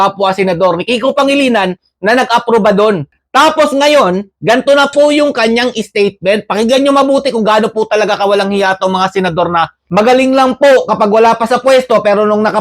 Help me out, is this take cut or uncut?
cut